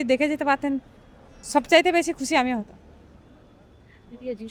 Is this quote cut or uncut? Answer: uncut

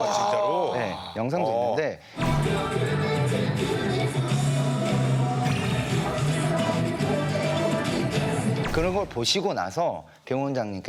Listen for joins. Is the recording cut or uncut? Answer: uncut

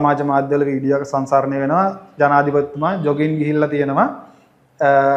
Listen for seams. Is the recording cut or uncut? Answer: uncut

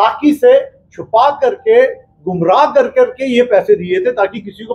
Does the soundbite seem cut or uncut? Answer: uncut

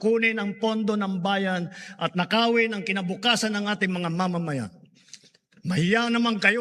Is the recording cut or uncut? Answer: uncut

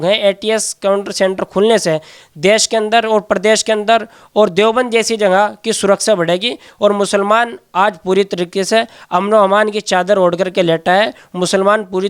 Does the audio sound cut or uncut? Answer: uncut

